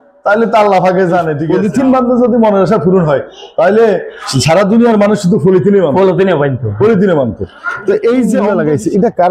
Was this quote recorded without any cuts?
no; 2 cuts; at 1.4 s, 8.4 s

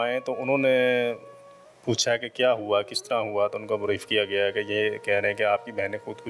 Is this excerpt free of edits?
yes; 0 cuts

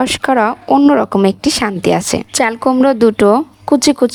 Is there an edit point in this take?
no; 0 cuts

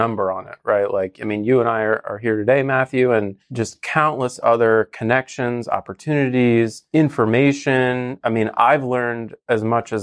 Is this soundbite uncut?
no; 2 cuts; at 3.4 s, 6.8 s

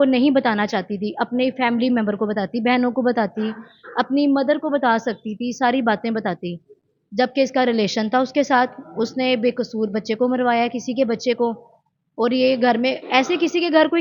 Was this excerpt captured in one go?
yes; 0 cuts

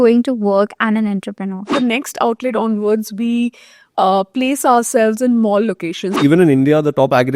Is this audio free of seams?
no; 2 cuts; at 1.7 s, 6.1 s

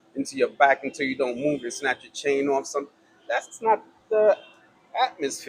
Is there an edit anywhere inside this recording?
no; 0 cuts

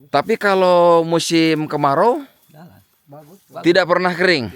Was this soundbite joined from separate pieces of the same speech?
no; 0 cuts

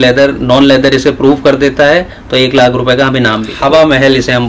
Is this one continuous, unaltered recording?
no; 1 cut; at 3.5 s

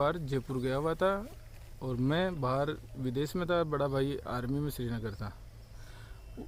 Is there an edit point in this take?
no; 0 cuts

